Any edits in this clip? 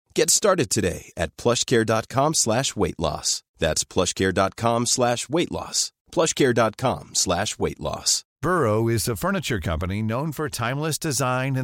yes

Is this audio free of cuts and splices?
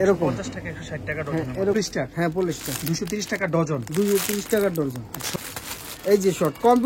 no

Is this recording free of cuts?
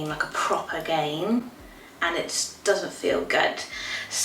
yes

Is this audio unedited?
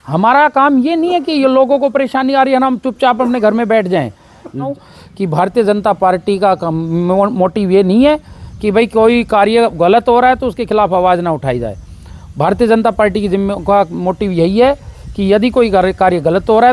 no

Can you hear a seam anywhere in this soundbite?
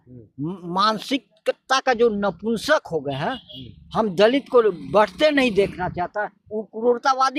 no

